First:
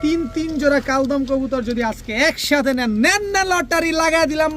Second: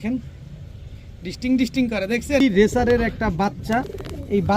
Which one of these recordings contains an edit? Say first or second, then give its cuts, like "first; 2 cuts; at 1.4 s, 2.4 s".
second; 1 cut; at 2.4 s